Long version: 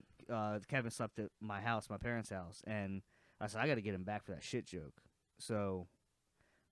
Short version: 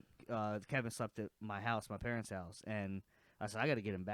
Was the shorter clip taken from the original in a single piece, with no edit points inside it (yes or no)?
yes